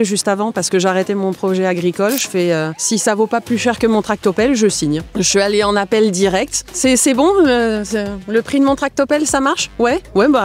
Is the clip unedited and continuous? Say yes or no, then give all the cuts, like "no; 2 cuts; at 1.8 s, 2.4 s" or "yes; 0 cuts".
no; 3 cuts; at 2.8 s, 5.1 s, 6.6 s